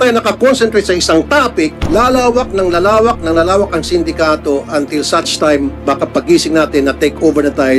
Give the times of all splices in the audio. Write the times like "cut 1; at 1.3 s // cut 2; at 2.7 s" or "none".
cut 1; at 1.8 s